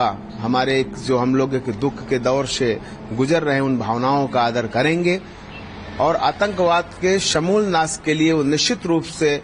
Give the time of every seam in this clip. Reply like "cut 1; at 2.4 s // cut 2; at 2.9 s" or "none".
none